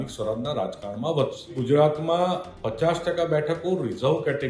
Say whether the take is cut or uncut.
cut